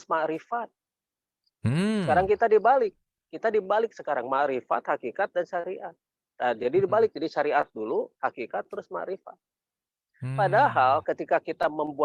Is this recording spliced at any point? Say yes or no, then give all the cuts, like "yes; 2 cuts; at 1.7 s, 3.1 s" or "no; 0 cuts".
no; 0 cuts